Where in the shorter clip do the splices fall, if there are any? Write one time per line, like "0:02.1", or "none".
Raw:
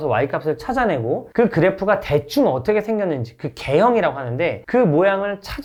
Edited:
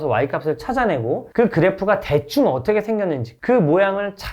0:03.3